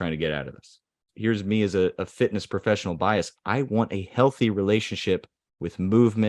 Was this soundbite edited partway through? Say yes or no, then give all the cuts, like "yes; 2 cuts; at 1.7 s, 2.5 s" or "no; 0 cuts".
yes; 1 cut; at 1.1 s